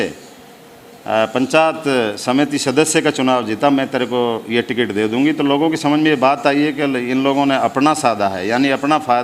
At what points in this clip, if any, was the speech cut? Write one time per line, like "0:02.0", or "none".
none